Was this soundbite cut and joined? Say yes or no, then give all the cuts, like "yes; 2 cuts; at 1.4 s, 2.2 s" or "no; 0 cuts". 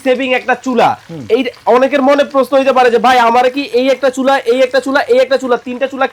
no; 0 cuts